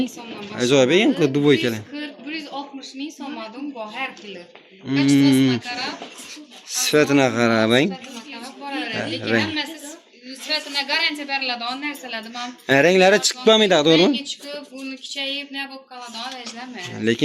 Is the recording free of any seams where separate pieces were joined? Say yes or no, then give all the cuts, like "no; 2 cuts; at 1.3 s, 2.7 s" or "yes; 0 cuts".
yes; 0 cuts